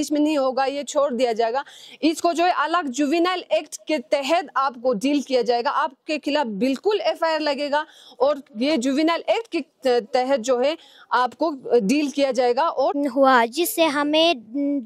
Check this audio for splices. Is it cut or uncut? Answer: cut